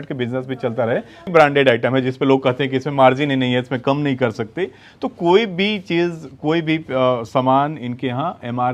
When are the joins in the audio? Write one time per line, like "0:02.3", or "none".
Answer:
0:01.3